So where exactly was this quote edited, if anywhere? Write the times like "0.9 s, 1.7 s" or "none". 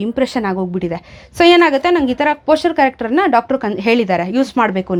none